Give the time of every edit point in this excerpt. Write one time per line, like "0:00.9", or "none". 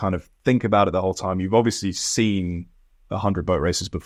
none